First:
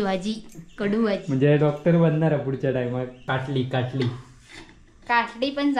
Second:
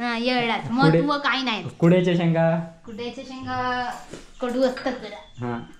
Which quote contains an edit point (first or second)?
first